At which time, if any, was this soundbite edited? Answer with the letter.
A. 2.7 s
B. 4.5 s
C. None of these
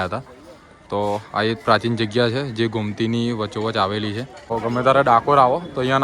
B